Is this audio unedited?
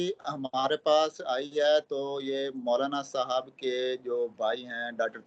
yes; 0 cuts

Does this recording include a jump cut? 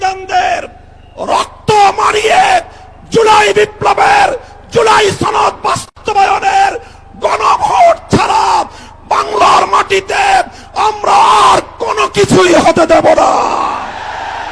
no; 0 cuts

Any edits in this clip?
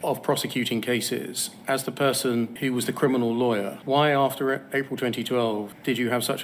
no; 0 cuts

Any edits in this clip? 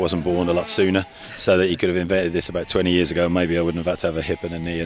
no; 0 cuts

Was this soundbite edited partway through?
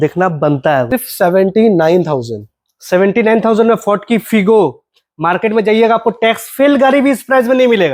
yes; 1 cut; at 0.9 s

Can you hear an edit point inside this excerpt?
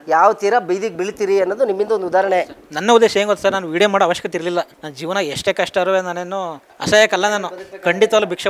no; 0 cuts

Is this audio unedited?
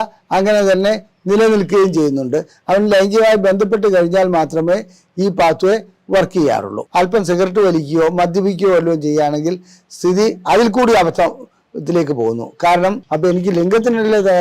no; 2 cuts; at 6.8 s, 13.1 s

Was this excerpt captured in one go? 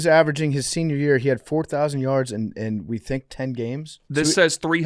no; 1 cut; at 3.9 s

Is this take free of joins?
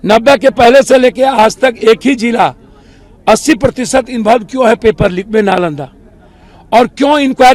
yes; 0 cuts

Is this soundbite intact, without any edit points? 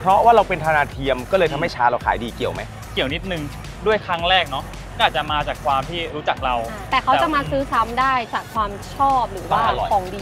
yes; 0 cuts

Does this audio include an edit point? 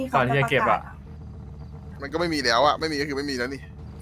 no; 0 cuts

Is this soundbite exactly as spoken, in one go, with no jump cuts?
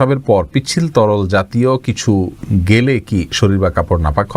yes; 0 cuts

